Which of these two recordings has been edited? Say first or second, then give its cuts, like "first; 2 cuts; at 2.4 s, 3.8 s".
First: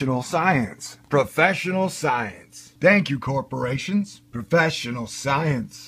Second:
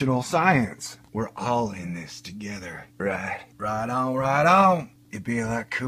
second; 2 cuts; at 0.9 s, 5.0 s